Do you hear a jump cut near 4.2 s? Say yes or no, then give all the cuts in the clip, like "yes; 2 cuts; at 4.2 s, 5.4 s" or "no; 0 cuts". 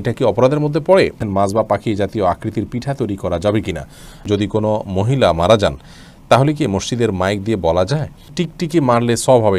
yes; 3 cuts; at 1.2 s, 4.2 s, 8.4 s